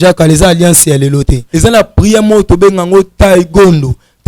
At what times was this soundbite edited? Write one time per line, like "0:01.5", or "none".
0:01.4